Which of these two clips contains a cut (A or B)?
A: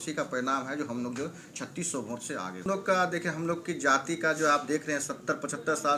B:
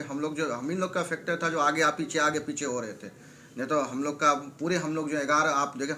A